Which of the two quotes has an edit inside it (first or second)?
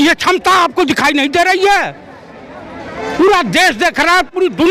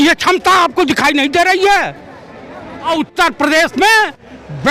second